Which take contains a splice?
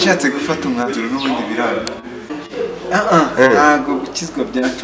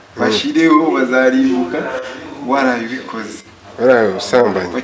first; 1 cut; at 2.3 s

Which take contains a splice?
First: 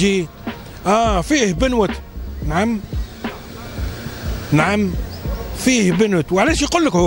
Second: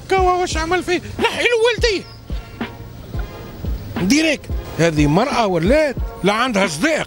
second; 2 cuts; at 4.6 s, 6.1 s

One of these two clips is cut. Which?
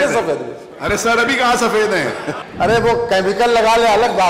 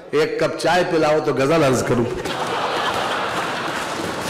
first; 1 cut; at 2.4 s

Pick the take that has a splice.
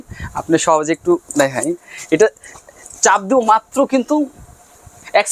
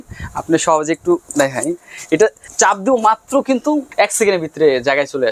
second; 2 cuts; at 2.4 s, 3.9 s

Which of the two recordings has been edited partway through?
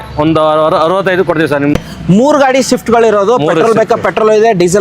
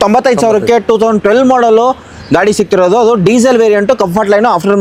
first; 1 cut; at 1.7 s

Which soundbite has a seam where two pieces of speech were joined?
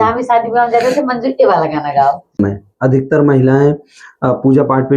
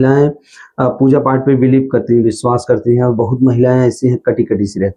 first; 1 cut; at 2.4 s

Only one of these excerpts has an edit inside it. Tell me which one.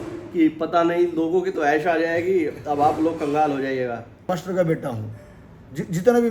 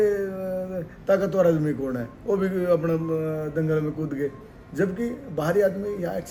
first; 1 cut; at 4.3 s

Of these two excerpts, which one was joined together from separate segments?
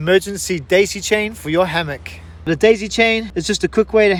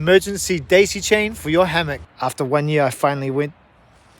second; 1 cut; at 2.0 s

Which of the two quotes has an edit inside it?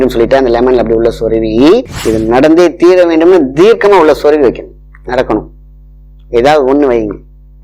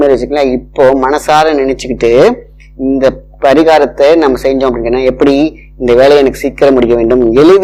first; 1 cut; at 1.9 s

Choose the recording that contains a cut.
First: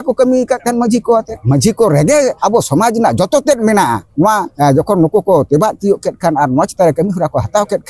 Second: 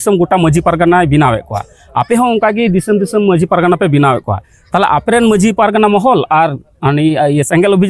first; 3 cuts; at 1.4 s, 2.4 s, 4.5 s

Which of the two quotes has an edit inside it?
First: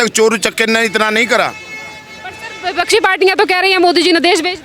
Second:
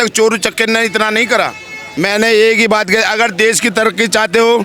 second; 1 cut; at 1.8 s

